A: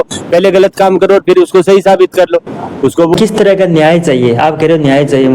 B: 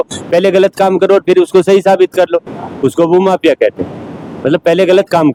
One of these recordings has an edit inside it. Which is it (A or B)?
A